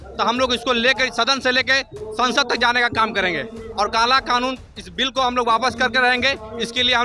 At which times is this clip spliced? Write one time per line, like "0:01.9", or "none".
0:03.6